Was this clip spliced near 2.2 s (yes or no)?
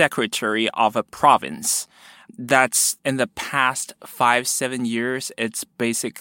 no